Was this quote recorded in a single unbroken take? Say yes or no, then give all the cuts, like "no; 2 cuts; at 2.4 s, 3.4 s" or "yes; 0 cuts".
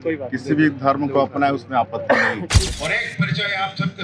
no; 1 cut; at 2.7 s